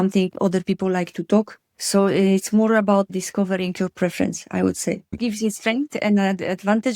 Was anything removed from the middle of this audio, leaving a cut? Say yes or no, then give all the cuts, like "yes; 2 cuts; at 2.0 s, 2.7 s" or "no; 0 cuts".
yes; 1 cut; at 5.2 s